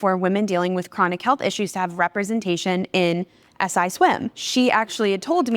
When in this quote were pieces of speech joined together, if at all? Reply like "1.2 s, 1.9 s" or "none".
4.4 s